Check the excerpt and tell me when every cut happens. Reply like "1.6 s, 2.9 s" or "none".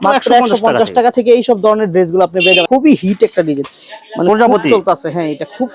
2.6 s